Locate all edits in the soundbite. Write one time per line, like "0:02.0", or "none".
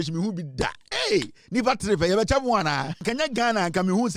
0:03.0

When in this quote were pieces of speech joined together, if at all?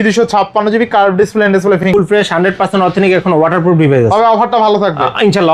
0:01.8

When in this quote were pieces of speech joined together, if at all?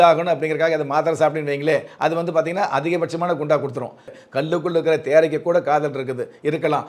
0:04.1

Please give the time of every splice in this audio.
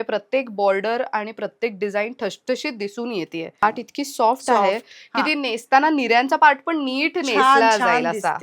0:03.6

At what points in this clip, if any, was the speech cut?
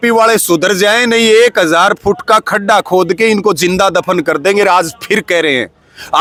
none

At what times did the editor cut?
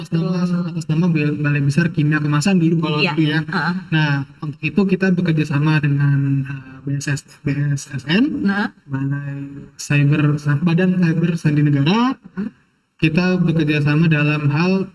none

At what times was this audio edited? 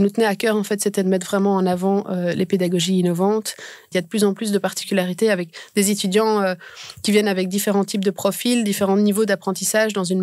0:03.8

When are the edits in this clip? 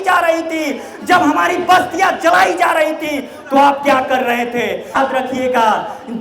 0:05.0

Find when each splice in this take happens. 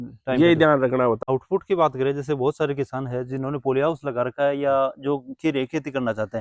0:01.2

